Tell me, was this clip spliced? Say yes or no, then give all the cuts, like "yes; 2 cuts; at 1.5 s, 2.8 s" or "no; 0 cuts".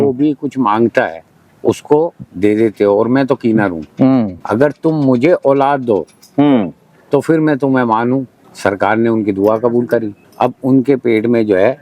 yes; 3 cuts; at 4.4 s, 8.4 s, 10.2 s